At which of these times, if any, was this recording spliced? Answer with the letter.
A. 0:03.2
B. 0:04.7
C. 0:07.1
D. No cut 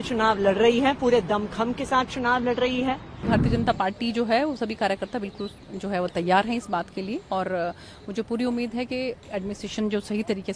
A